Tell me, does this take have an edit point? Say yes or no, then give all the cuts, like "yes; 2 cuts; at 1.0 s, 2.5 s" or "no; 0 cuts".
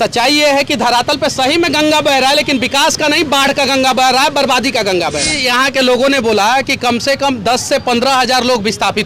yes; 1 cut; at 5.3 s